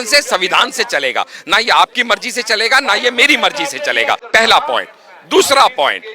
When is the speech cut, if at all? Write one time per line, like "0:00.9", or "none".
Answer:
0:04.2